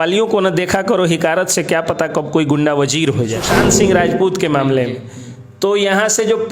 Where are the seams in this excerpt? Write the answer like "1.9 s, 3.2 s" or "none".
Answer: 3.5 s